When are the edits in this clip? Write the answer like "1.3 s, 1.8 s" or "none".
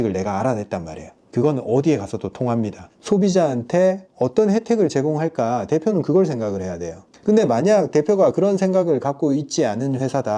2.9 s